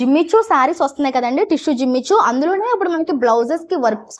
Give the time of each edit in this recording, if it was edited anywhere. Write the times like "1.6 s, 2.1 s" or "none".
none

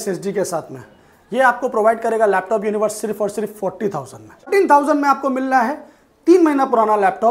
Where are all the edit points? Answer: 4.5 s

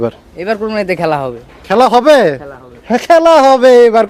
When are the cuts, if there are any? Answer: none

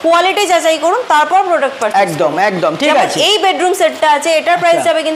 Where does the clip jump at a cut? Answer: none

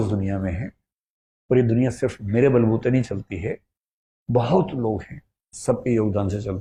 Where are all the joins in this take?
none

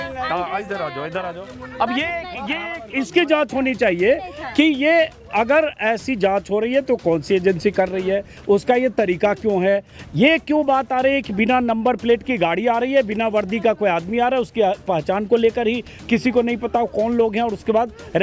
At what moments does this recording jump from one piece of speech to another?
none

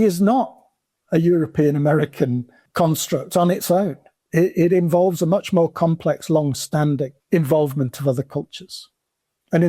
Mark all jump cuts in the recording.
2.6 s, 7.2 s

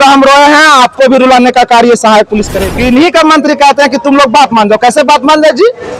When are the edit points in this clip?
2.6 s

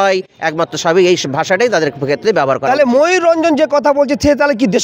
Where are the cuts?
none

